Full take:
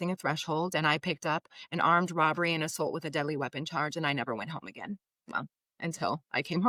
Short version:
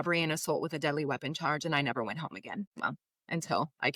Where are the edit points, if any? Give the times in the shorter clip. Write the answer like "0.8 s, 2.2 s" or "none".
2.7 s